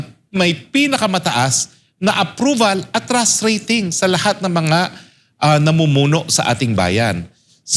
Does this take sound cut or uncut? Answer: uncut